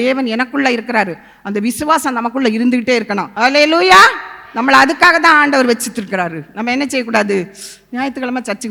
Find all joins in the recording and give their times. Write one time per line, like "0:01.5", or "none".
none